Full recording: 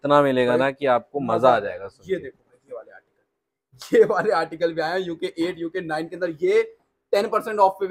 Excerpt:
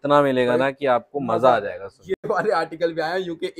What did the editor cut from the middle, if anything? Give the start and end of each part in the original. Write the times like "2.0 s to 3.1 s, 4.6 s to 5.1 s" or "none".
2.3 s to 4.1 s